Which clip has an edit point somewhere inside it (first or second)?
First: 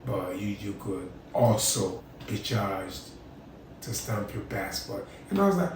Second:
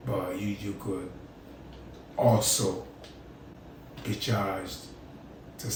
first